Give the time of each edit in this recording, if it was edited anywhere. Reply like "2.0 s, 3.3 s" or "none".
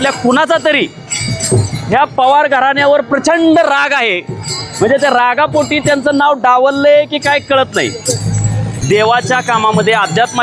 8.8 s